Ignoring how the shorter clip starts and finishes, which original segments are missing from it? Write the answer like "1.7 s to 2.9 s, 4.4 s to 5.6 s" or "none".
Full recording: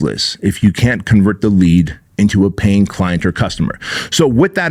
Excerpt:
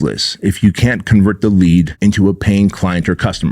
1.9 s to 2.1 s